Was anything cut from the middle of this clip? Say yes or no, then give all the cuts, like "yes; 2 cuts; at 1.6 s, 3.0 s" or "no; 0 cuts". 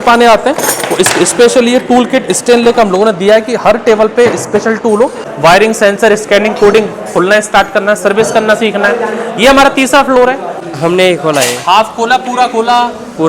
yes; 2 cuts; at 5.2 s, 10.6 s